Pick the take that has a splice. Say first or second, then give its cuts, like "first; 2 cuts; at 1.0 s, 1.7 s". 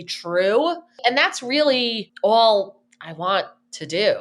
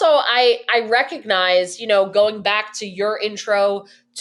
first; 2 cuts; at 1.0 s, 2.0 s